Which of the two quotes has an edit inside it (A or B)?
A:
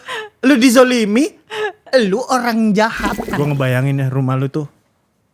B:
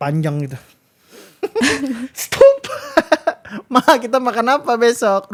A